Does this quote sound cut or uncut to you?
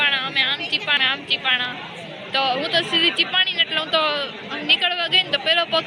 cut